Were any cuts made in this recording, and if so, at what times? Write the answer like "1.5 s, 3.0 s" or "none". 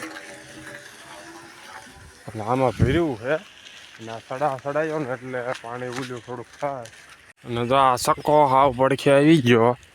7.6 s